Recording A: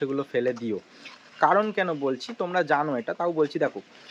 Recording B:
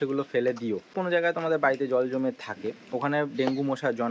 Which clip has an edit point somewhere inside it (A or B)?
B